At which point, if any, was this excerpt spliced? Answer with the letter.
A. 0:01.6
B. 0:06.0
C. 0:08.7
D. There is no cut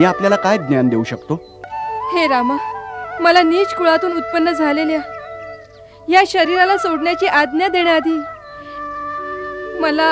A